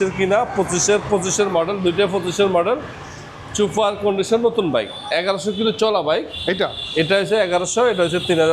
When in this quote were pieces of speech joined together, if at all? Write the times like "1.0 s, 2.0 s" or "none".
none